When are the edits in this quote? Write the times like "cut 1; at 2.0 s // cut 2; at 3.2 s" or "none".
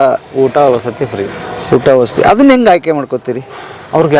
none

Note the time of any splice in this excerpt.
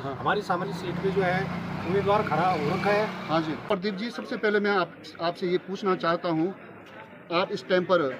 cut 1; at 3.6 s

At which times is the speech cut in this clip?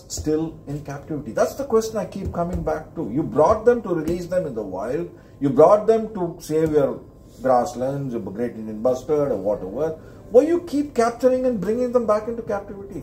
none

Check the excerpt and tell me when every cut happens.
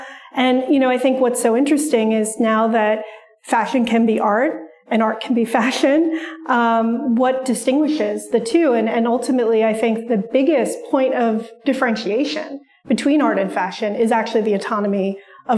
none

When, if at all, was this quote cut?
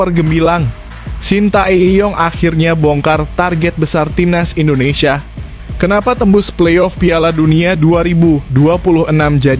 none

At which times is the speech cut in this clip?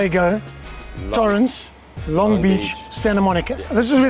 none

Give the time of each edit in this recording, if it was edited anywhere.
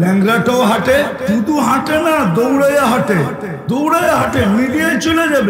cut 1; at 1.2 s // cut 2; at 3.5 s

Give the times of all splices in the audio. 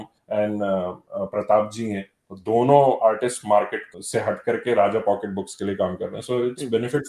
cut 1; at 3.8 s

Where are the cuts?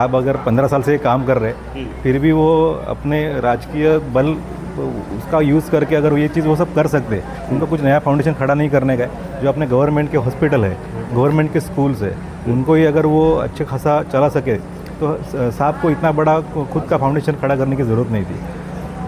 none

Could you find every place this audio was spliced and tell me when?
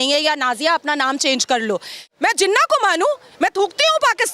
cut 1; at 2.1 s

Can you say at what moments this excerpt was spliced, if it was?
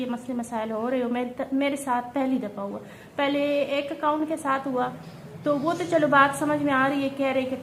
none

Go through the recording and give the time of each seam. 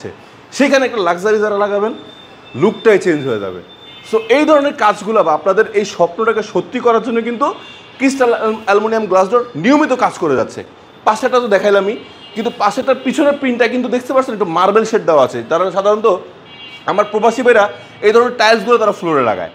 none

